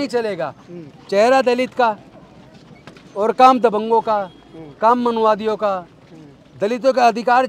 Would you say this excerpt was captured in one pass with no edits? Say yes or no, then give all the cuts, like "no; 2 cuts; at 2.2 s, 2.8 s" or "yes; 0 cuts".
yes; 0 cuts